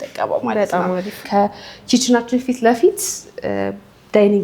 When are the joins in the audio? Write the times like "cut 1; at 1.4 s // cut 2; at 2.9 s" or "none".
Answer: cut 1; at 1.2 s

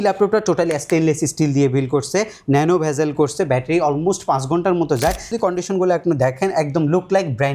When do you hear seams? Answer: cut 1; at 5.4 s

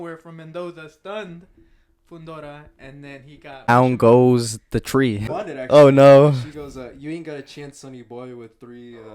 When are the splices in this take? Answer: cut 1; at 3.7 s // cut 2; at 5.3 s

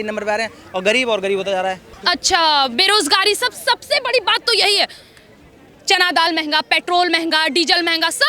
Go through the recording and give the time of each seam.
cut 1; at 1.9 s

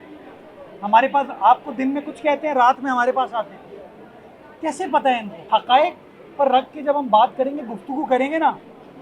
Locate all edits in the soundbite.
cut 1; at 5.3 s

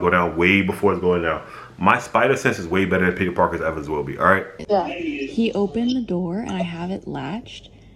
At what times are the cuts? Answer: cut 1; at 4.6 s

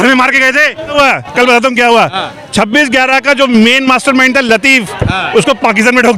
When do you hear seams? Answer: cut 1; at 1.0 s

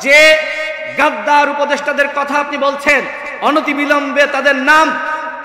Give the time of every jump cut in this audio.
none

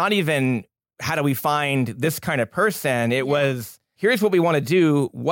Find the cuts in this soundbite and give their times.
cut 1; at 1.1 s

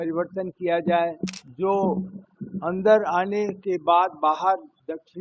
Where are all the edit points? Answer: cut 1; at 1.4 s

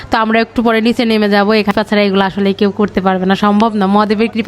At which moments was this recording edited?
cut 1; at 1.7 s

